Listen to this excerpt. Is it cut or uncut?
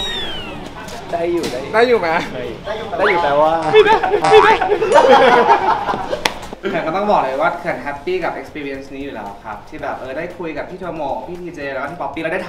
cut